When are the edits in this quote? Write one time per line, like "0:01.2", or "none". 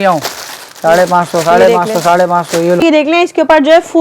0:02.8